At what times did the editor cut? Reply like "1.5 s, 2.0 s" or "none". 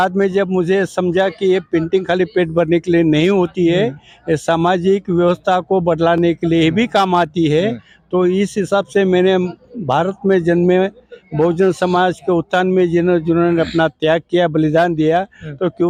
none